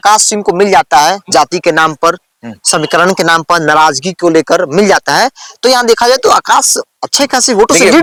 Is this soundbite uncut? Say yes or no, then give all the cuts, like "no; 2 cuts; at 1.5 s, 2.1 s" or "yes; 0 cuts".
yes; 0 cuts